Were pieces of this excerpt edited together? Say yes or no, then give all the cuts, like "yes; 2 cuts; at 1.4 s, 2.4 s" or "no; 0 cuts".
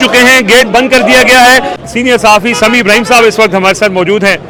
no; 0 cuts